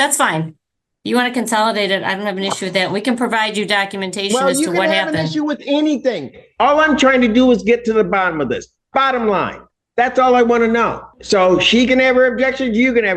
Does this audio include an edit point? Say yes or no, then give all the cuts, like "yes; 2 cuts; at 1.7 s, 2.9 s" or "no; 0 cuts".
yes; 1 cut; at 11.1 s